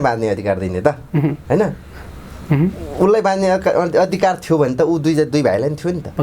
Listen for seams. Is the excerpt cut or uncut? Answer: uncut